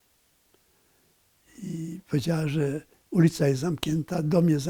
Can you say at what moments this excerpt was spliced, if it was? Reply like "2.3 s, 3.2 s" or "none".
none